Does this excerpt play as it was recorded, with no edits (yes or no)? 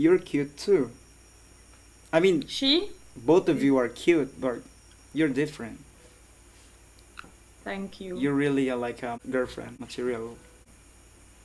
yes